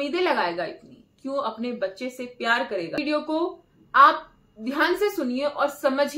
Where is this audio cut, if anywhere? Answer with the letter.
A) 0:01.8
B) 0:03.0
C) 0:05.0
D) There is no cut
B